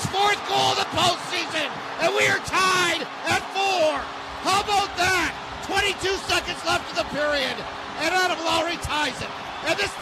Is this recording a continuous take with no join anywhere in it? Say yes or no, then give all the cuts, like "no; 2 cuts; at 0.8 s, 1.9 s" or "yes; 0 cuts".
yes; 0 cuts